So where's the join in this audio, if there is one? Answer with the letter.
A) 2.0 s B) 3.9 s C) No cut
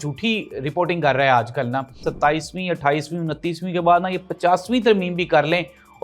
A